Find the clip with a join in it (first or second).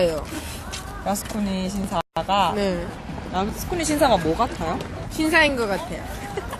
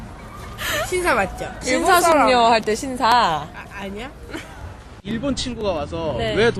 first